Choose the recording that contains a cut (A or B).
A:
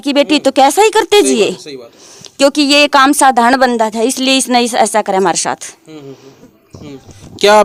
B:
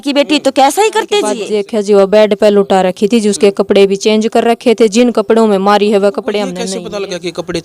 B